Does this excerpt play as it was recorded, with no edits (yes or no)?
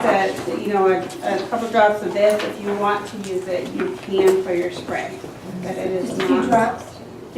yes